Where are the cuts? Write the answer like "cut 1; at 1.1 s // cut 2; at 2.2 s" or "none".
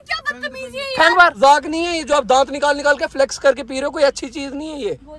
cut 1; at 1.4 s